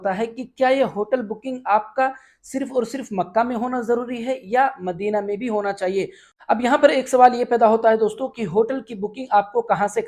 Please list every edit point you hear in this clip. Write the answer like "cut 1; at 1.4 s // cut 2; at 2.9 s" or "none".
cut 1; at 6.2 s